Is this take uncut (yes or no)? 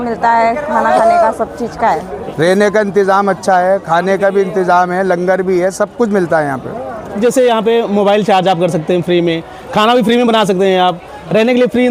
no